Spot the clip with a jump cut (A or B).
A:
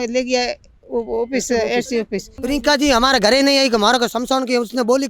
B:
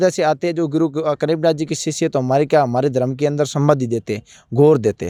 A